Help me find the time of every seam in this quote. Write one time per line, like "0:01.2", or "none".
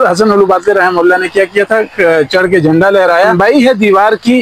0:03.3